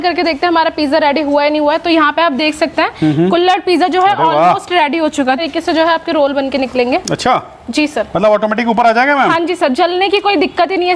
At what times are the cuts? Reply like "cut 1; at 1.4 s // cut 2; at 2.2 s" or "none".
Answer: cut 1; at 5.4 s